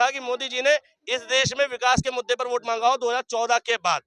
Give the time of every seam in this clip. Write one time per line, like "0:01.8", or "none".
none